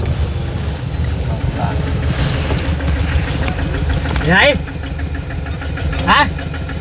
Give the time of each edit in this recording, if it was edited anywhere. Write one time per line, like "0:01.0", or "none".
none